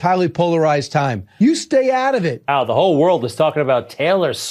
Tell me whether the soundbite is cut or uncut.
cut